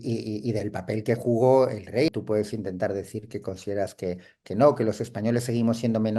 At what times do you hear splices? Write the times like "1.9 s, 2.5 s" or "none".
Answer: 2.1 s